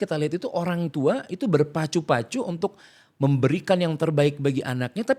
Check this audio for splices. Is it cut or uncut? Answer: uncut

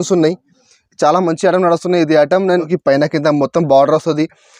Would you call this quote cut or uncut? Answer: cut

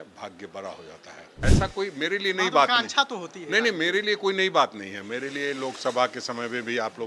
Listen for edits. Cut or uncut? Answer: cut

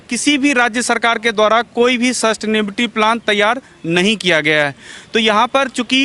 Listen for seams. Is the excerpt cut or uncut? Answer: uncut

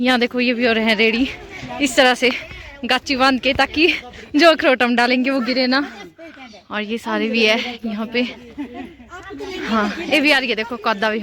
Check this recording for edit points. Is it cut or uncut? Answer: uncut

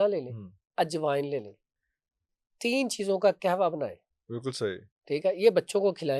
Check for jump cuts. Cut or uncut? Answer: uncut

